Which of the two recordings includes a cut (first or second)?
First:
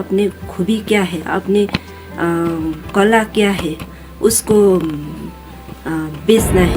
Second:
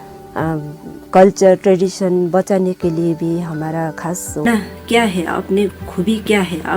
second